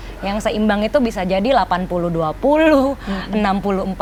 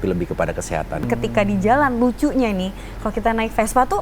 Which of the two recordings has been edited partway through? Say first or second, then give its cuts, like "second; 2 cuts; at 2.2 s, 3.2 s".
second; 1 cut; at 1.1 s